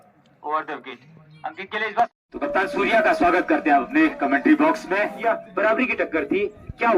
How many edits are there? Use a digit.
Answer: 2